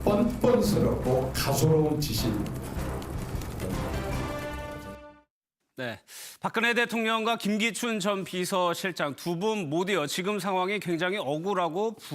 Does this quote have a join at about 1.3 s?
yes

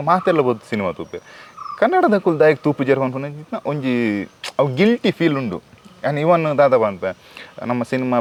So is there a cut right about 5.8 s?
no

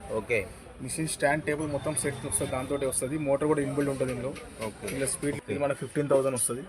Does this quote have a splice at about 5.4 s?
yes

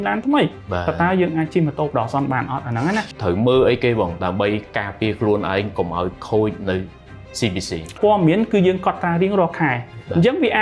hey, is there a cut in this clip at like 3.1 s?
yes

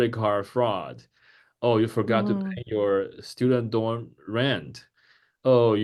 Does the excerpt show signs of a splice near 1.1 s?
no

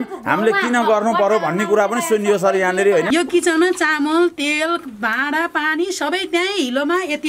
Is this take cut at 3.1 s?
yes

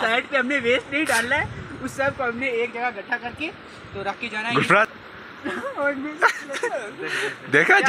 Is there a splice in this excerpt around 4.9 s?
yes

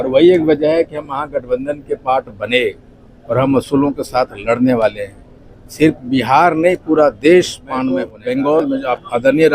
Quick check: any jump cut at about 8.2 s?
yes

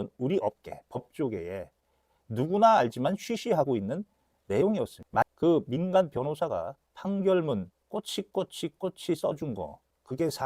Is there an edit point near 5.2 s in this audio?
yes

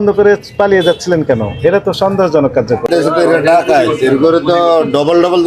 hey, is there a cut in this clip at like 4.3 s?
no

